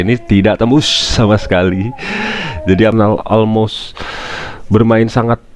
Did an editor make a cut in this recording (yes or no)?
yes